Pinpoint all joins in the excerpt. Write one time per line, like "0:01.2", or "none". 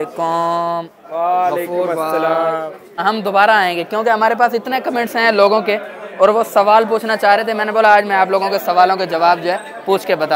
none